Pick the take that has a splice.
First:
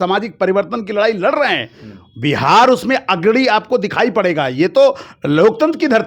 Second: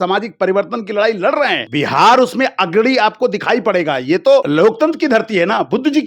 second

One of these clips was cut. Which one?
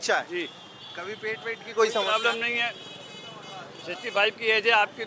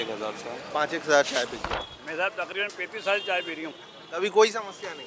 second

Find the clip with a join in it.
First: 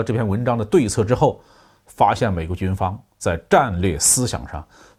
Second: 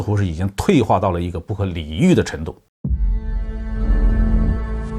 second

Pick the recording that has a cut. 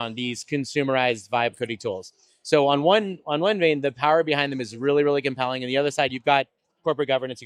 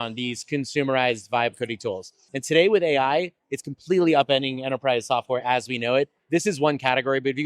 second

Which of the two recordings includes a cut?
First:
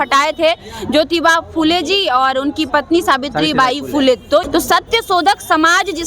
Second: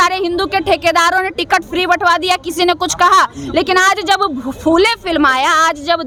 first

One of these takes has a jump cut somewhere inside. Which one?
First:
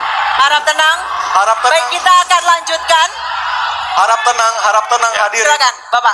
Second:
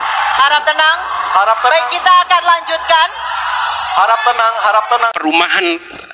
second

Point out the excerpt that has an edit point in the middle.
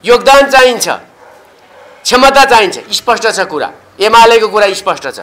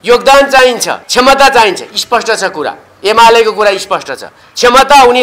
second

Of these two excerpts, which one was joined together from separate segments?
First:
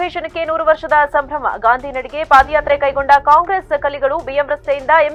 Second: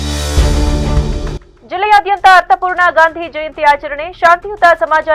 second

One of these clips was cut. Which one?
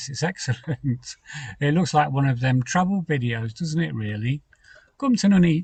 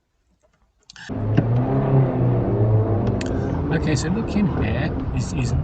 second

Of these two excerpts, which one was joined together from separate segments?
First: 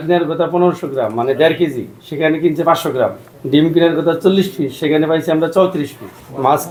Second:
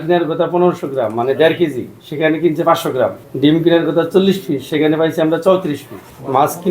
second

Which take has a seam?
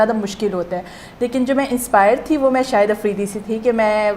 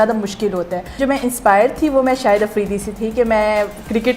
second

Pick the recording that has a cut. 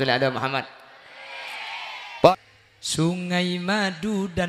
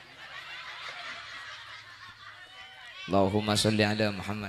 first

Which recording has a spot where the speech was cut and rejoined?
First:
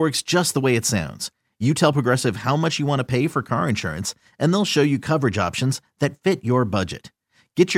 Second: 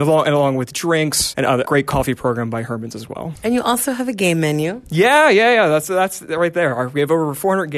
second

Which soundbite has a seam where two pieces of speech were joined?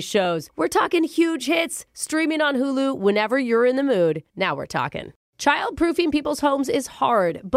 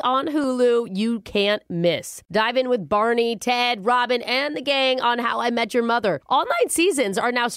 first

